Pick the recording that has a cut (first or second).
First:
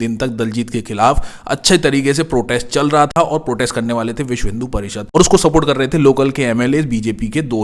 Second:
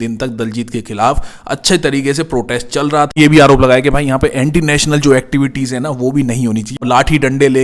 second